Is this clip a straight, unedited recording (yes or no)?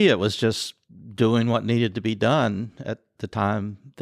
yes